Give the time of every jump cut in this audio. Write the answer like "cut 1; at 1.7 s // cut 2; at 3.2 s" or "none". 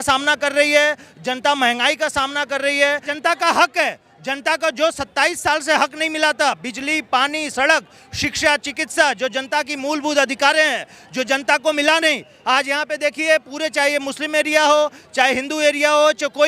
cut 1; at 3.1 s